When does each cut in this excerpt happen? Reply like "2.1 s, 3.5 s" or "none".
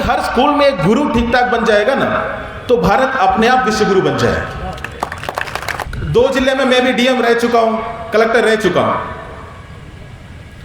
5.9 s